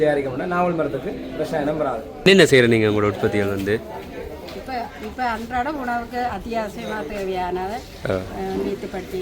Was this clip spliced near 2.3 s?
yes; 1 cut; at 2.3 s

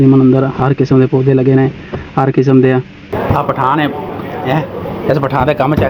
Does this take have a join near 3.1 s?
yes; 1 cut; at 3.1 s

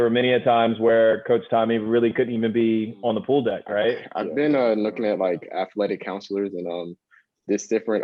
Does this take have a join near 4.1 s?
yes; 1 cut; at 4.1 s

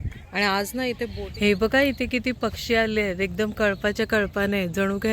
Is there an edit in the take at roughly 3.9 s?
no; 1 cut; at 1.1 s

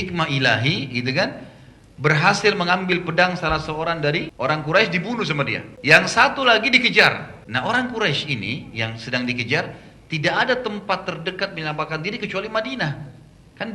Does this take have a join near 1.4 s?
no; 3 cuts; at 4.3 s, 5.7 s, 7.3 s

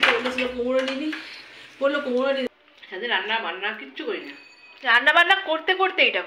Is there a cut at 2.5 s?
yes; 1 cut; at 2.5 s

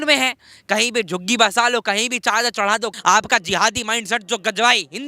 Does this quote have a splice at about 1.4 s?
no; 1 cut; at 2.9 s

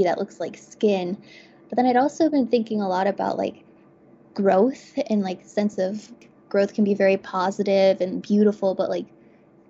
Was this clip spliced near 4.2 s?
no; 1 cut; at 6.1 s

